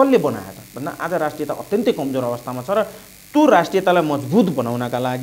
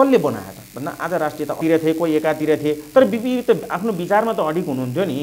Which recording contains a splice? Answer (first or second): second